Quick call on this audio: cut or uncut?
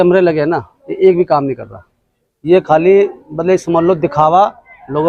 uncut